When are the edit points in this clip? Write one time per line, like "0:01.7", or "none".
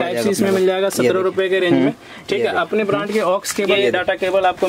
0:03.7